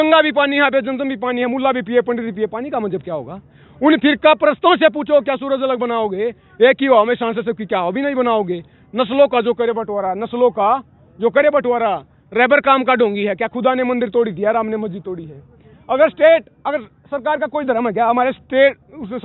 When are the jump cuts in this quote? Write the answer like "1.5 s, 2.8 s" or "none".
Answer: none